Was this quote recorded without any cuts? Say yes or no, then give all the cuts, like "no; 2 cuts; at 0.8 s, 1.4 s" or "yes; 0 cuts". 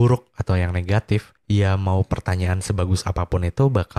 no; 1 cut; at 1.3 s